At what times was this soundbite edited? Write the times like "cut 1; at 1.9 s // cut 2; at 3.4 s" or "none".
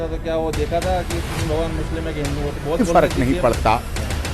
cut 1; at 2.8 s